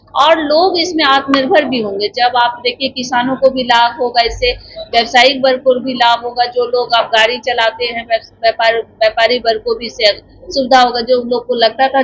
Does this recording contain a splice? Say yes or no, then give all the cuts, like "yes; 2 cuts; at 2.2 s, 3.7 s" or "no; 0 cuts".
no; 0 cuts